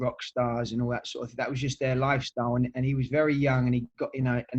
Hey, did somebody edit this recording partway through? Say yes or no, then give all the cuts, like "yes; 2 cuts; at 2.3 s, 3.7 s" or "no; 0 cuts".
no; 0 cuts